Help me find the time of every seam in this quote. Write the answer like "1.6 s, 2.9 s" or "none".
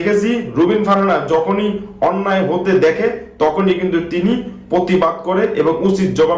none